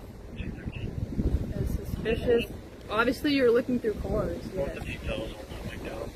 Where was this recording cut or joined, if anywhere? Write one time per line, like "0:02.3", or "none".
none